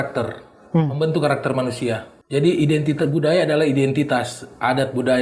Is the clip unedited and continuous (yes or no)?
no